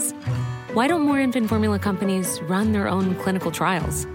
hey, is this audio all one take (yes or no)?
yes